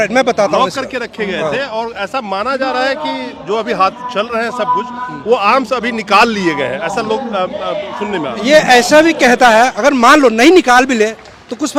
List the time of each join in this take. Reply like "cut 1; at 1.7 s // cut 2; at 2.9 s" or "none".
none